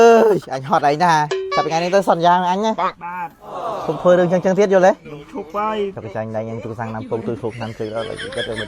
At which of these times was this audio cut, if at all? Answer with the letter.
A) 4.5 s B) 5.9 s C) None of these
B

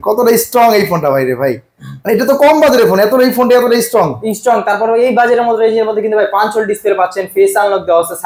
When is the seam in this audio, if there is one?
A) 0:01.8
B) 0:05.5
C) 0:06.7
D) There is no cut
D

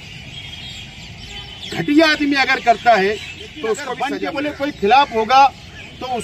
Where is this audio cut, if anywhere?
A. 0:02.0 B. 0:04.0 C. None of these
B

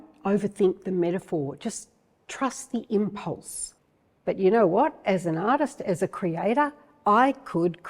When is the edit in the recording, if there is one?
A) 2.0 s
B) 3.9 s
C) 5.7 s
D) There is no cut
B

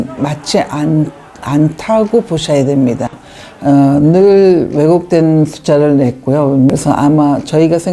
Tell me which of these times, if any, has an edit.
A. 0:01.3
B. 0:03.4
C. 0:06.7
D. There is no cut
C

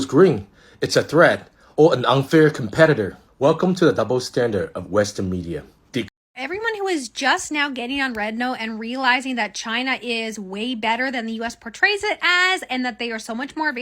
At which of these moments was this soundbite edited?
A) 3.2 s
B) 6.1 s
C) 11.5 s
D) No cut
B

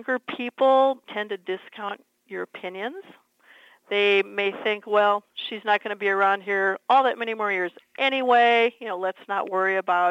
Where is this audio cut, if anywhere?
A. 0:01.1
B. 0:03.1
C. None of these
A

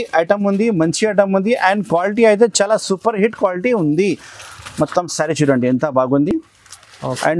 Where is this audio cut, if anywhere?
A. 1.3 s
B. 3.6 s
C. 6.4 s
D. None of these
D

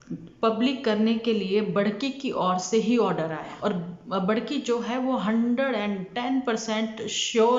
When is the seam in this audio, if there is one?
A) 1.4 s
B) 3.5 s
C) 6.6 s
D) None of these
B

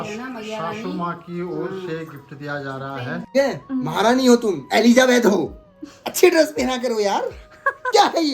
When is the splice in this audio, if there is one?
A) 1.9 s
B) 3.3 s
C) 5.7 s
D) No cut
B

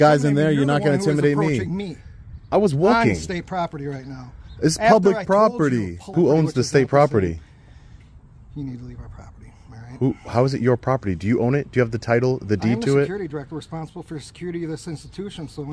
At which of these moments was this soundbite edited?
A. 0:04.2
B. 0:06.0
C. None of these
B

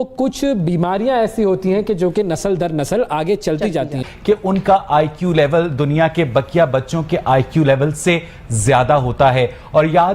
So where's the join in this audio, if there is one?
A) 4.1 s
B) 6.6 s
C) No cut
A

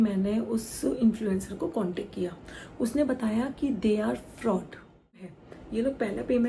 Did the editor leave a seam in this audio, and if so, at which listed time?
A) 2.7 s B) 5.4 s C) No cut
B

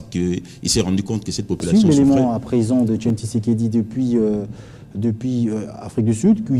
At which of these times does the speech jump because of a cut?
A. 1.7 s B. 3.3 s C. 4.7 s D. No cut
A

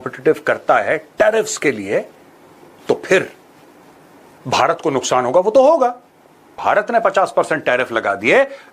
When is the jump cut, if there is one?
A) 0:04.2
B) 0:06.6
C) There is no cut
B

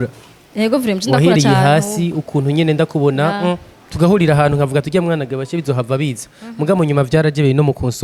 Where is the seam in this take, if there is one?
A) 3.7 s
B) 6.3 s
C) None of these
C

